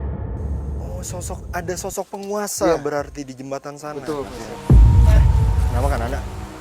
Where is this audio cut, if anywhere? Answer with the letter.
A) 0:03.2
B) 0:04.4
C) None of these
B